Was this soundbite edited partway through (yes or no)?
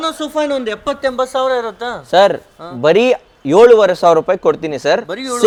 no